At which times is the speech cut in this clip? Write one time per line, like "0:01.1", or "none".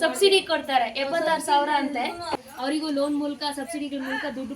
0:02.4